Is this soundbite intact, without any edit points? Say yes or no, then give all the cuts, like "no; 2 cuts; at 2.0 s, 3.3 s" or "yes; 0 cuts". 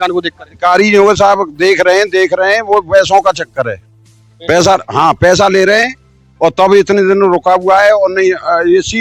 yes; 0 cuts